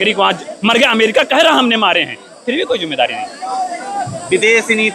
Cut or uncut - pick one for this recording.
uncut